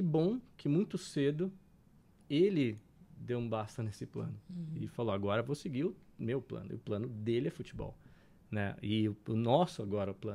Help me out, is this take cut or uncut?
uncut